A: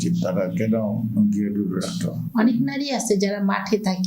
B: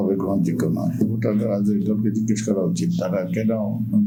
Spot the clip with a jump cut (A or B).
A